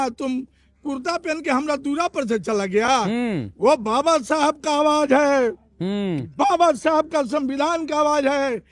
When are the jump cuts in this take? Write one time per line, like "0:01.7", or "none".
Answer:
none